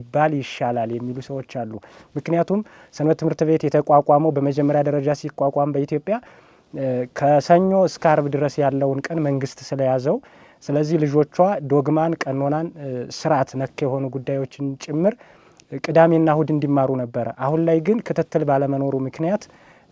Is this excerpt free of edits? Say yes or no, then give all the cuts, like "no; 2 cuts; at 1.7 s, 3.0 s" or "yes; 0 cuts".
yes; 0 cuts